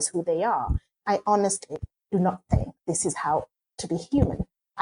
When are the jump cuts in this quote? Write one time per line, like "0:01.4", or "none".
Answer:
0:00.9

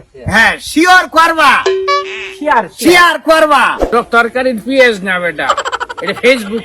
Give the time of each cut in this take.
0:03.8

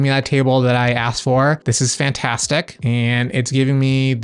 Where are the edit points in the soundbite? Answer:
none

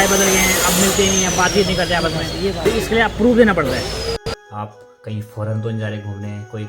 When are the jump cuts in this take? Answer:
0:04.3

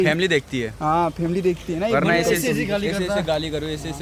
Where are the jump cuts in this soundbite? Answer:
none

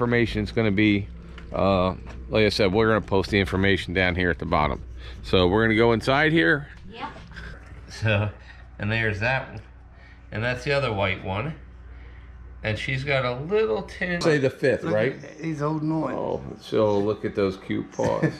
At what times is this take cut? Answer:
0:07.6
0:14.2

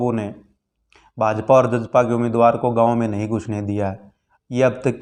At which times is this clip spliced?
none

